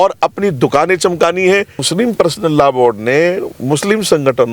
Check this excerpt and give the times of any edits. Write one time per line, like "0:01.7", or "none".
0:01.8